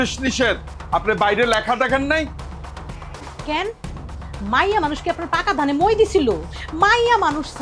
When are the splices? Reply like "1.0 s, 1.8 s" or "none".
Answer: none